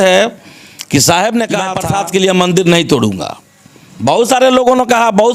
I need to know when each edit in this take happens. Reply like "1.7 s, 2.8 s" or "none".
1.8 s

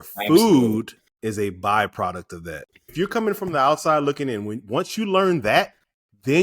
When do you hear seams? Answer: 1.0 s, 2.9 s

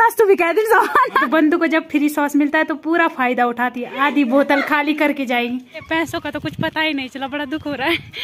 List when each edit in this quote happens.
1.3 s, 5.8 s

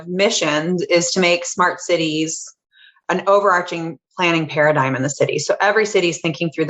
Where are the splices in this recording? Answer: 3.0 s

